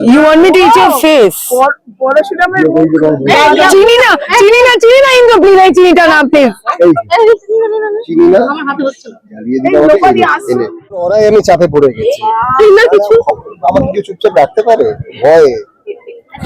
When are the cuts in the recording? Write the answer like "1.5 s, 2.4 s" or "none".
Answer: 11.1 s